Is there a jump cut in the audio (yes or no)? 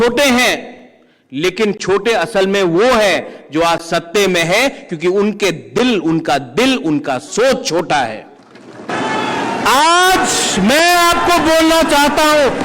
yes